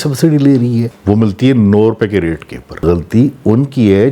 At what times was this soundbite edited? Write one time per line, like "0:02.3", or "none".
0:00.9
0:02.8